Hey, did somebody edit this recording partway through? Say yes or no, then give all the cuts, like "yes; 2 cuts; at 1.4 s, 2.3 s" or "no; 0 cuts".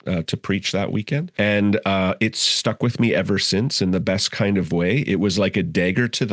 yes; 1 cut; at 1.3 s